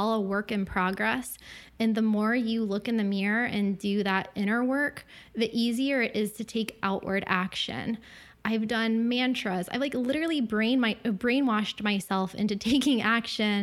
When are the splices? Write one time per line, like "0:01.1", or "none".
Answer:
none